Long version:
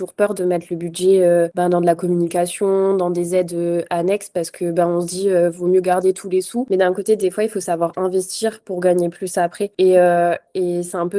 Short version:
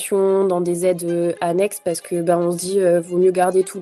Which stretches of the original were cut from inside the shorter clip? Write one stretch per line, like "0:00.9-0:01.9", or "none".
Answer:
none